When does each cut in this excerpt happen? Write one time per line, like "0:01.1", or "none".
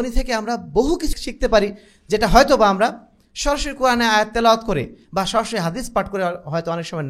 0:01.2